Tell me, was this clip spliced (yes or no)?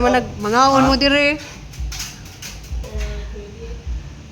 yes